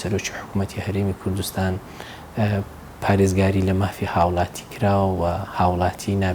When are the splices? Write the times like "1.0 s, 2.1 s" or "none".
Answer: none